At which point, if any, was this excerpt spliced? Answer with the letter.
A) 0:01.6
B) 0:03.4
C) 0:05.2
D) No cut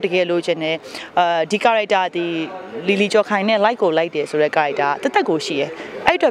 D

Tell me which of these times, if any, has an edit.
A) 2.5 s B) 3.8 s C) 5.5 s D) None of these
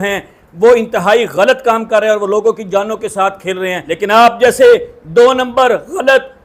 B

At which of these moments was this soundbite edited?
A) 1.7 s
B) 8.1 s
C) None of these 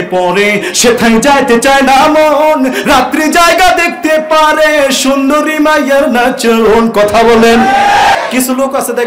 B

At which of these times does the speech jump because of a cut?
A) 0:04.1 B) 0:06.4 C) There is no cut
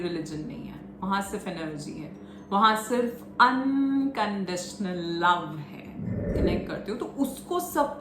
B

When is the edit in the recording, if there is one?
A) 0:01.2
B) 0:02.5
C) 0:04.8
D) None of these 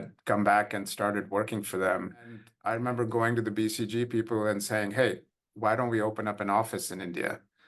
B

